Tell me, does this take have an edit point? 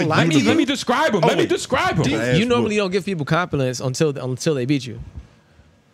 yes; 1 cut; at 2.2 s

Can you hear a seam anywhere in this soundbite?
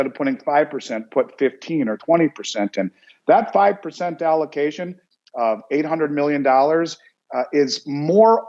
no; 0 cuts

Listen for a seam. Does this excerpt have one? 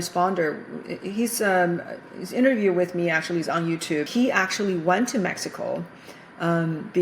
yes; 1 cut; at 4.1 s

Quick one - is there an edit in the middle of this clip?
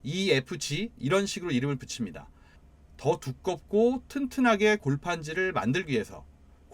yes; 1 cut; at 2.5 s

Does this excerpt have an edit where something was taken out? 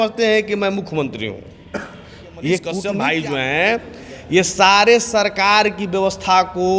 yes; 1 cut; at 2.9 s

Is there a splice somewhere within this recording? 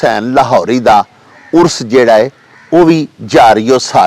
no; 0 cuts

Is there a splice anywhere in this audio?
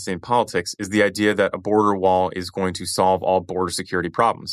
no; 0 cuts

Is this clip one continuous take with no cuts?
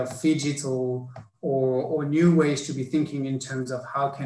yes; 0 cuts

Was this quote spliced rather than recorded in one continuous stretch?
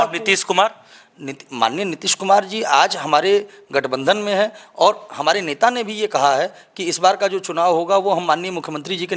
no; 0 cuts

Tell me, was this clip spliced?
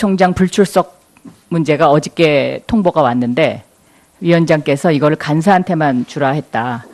no; 0 cuts

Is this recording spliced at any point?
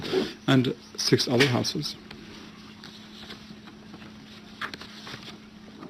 no; 0 cuts

